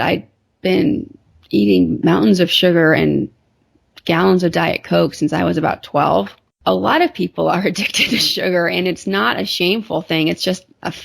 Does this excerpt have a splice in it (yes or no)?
yes